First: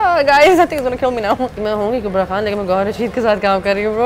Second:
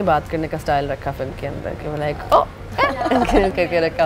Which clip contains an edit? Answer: first; 1 cut; at 1.6 s

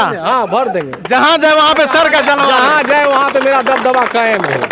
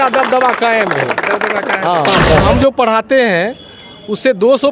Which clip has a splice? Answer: second; 1 cut; at 2.4 s

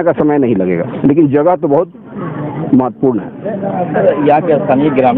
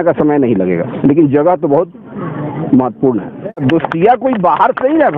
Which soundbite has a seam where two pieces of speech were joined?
second; 1 cut; at 3.6 s

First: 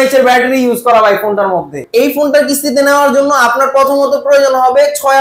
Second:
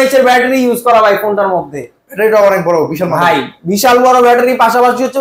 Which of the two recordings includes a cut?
first; 1 cut; at 1.8 s

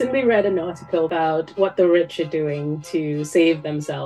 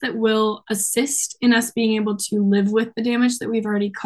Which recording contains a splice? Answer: first; 1 cut; at 1.1 s

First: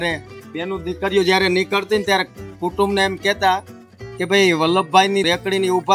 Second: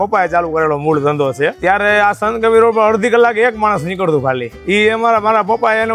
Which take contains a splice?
second; 2 cuts; at 1.6 s, 4.5 s

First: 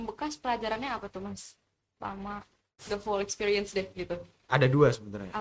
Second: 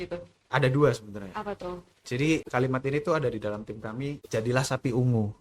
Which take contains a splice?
second; 2 cuts; at 2.5 s, 4.2 s

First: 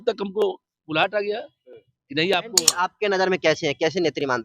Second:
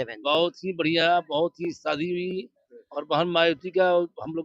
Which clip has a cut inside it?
first; 1 cut; at 2.6 s

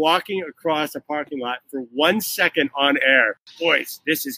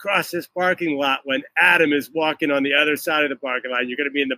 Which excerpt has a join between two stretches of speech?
first; 1 cut; at 3.5 s

